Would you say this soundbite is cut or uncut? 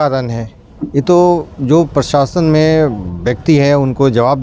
uncut